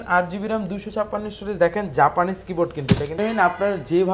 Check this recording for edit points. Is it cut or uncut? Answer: cut